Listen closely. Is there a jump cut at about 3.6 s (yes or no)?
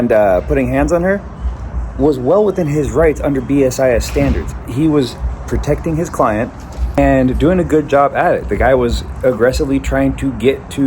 no